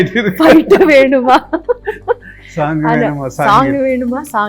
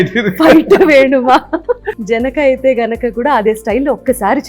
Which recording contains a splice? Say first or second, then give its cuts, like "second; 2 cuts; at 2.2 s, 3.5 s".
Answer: second; 1 cut; at 1.9 s